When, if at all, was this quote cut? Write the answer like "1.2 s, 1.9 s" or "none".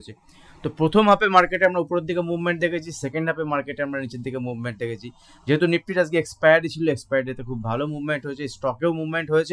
none